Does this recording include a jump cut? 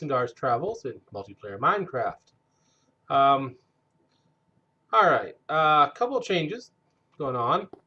no; 0 cuts

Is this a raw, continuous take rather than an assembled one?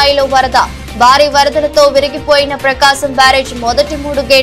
yes; 0 cuts

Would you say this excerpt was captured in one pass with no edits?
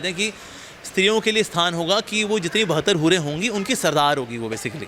yes; 0 cuts

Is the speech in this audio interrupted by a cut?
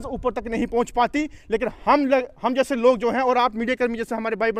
no; 0 cuts

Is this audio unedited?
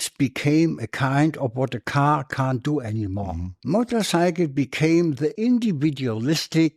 yes; 0 cuts

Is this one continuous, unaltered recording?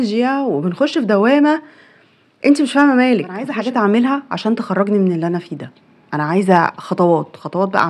no; 1 cut; at 3.5 s

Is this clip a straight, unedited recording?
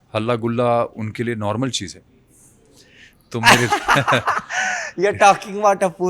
yes; 0 cuts

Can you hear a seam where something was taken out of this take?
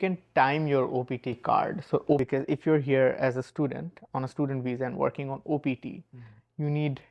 yes; 1 cut; at 2.2 s

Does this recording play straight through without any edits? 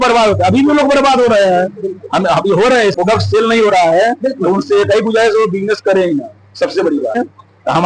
no; 2 cuts; at 2.9 s, 7.2 s

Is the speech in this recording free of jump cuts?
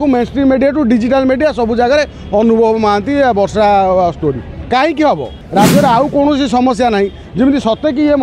no; 1 cut; at 5.4 s

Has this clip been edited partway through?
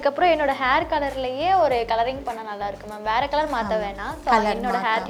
no; 0 cuts

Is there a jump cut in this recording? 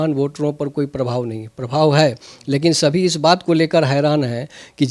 no; 0 cuts

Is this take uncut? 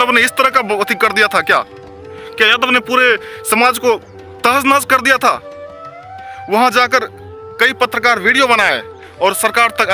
yes; 0 cuts

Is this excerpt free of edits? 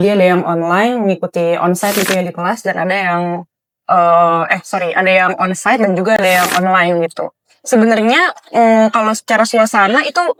yes; 0 cuts

